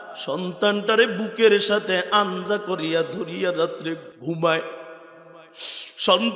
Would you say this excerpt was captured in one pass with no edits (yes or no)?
no